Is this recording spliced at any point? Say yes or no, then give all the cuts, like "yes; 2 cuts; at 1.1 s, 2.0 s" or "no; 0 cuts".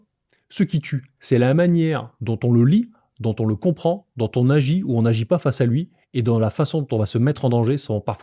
no; 0 cuts